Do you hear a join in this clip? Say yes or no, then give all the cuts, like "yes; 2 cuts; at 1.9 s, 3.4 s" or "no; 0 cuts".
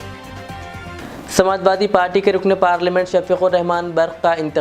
yes; 1 cut; at 1.0 s